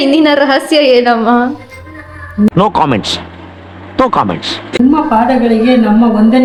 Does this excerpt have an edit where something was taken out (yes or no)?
no